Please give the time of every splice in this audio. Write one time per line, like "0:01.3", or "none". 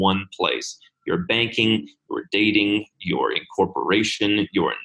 none